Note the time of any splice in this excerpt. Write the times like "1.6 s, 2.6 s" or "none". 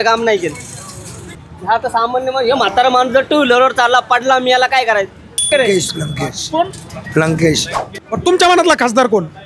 1.5 s, 5.5 s, 7.9 s